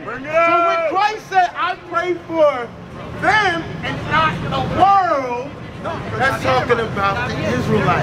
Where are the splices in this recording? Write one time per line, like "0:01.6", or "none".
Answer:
none